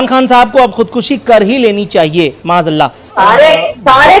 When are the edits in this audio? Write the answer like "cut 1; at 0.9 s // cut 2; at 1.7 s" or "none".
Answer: cut 1; at 3.1 s